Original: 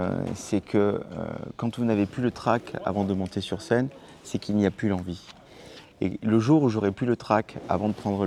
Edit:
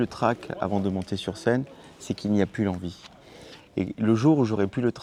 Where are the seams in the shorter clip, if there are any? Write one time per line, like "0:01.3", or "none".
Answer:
none